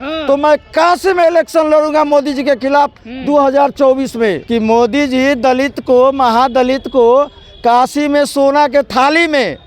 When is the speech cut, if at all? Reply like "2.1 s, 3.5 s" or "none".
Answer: 4.4 s